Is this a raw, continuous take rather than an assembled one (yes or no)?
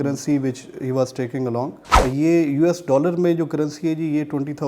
no